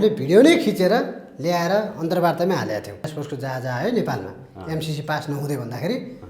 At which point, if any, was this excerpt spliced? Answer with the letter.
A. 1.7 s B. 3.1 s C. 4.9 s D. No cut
B